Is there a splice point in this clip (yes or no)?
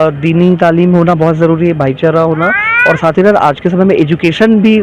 no